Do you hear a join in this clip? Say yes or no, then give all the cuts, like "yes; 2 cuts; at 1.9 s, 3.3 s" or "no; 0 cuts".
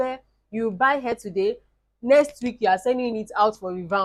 no; 0 cuts